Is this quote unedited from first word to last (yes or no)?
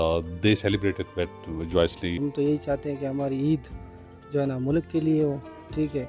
no